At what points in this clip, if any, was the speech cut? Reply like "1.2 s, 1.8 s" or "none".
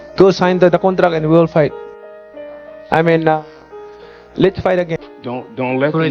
5.1 s